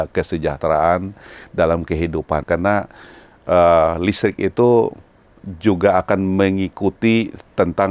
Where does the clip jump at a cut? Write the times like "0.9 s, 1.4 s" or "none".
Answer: 2.4 s